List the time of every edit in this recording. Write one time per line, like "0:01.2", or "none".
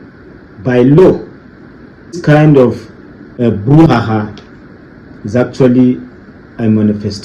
0:02.2